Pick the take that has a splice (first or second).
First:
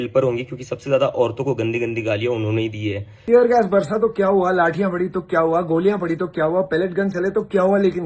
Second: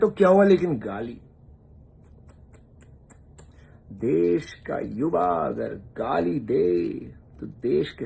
first